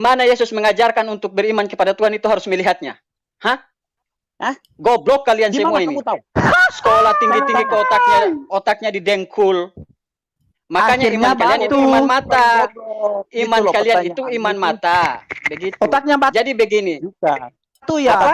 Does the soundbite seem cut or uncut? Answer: uncut